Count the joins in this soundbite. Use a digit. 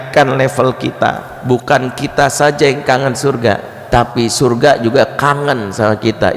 2